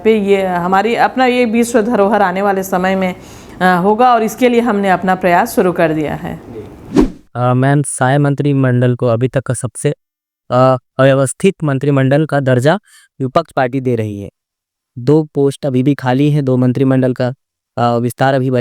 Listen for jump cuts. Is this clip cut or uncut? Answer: cut